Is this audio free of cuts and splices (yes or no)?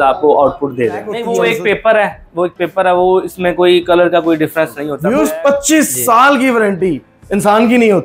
no